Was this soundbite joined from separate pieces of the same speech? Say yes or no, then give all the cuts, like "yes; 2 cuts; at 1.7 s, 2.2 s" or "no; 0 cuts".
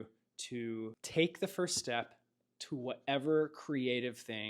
yes; 1 cut; at 1.0 s